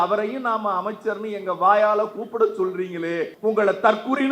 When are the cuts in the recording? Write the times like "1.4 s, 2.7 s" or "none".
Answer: 3.3 s